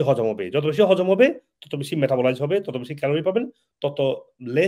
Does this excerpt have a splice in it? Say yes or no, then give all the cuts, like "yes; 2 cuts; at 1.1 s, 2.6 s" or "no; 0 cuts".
no; 0 cuts